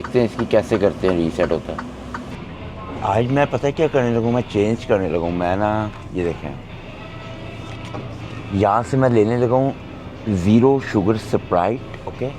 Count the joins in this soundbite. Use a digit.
1